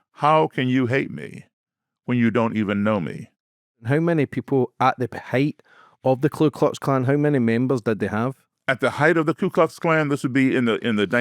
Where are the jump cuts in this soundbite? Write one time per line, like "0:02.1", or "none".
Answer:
0:03.8